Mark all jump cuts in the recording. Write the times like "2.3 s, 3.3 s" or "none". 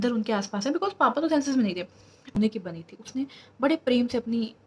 2.2 s